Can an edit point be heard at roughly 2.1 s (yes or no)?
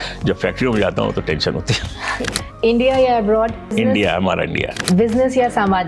yes